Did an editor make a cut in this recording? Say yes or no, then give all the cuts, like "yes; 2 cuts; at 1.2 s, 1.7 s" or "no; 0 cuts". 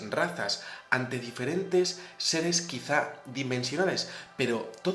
yes; 1 cut; at 1.2 s